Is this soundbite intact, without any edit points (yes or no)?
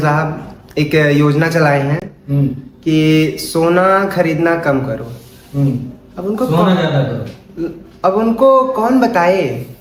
yes